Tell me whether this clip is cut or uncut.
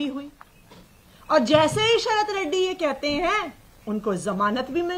uncut